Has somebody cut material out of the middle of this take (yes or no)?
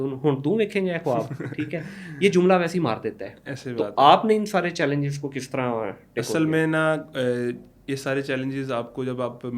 no